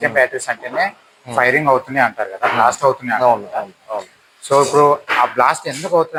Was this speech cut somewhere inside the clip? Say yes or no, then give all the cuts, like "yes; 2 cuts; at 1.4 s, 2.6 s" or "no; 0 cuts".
no; 0 cuts